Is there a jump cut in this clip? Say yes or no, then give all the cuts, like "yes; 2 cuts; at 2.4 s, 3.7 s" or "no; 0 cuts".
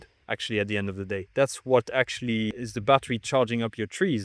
yes; 2 cuts; at 1.2 s, 2.6 s